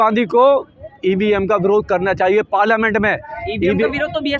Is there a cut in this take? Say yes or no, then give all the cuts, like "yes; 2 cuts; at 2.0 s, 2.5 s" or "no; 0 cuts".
no; 0 cuts